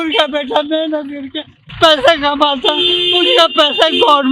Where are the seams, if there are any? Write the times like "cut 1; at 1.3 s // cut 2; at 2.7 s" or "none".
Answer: none